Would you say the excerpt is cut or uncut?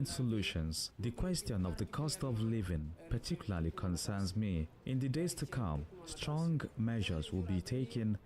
cut